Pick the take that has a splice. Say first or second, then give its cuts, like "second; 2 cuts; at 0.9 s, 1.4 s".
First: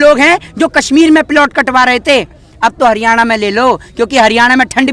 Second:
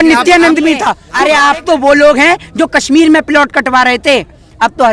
second; 1 cut; at 1.0 s